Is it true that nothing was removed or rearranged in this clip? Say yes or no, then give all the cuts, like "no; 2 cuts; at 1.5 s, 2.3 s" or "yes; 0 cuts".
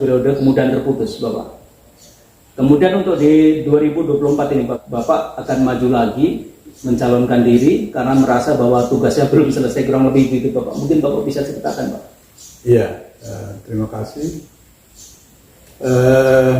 yes; 0 cuts